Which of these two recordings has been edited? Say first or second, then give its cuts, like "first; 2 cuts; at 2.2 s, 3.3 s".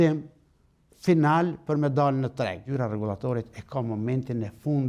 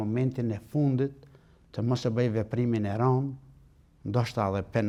first; 1 cut; at 2.6 s